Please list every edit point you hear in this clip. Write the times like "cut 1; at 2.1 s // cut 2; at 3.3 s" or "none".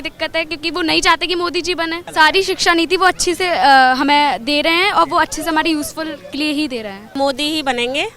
cut 1; at 2.0 s // cut 2; at 7.1 s